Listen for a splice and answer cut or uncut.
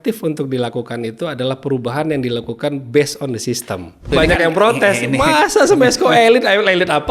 cut